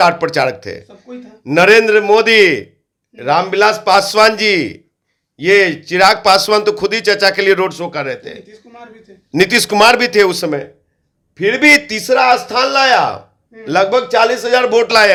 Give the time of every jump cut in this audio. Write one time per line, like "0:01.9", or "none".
none